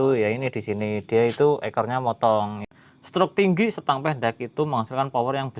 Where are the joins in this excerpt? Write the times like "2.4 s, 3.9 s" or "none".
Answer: 2.7 s